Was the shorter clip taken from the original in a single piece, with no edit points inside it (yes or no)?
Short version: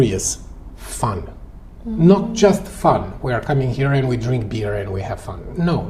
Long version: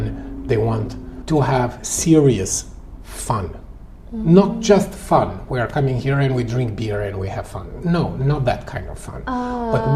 yes